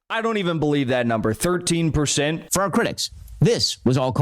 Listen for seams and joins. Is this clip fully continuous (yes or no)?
no